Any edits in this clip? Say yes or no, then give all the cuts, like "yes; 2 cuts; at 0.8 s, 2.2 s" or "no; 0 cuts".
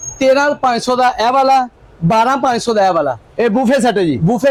no; 0 cuts